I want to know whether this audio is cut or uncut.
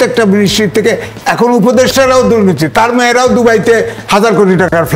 uncut